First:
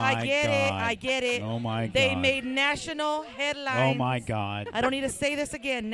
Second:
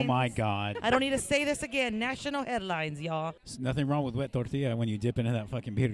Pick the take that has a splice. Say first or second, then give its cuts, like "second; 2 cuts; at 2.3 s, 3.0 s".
second; 1 cut; at 3.1 s